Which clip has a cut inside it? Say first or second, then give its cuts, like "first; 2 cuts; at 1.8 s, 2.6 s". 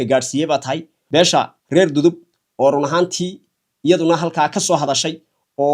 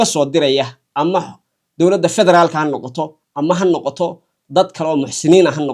first; 1 cut; at 1.1 s